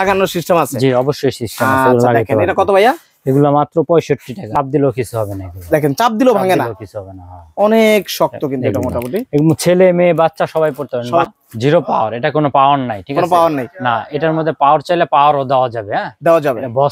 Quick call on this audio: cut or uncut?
cut